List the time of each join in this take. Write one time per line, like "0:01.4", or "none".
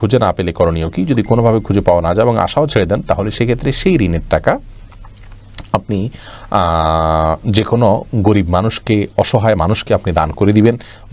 none